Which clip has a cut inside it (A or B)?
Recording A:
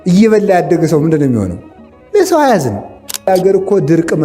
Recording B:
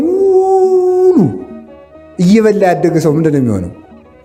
A